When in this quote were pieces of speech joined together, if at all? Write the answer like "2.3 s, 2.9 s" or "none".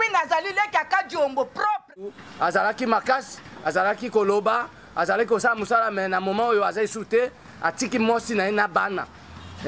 2.2 s